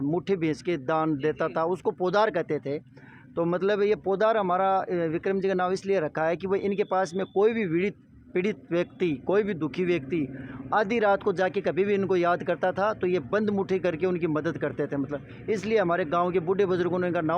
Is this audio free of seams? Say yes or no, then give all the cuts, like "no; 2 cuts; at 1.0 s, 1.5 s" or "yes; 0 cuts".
yes; 0 cuts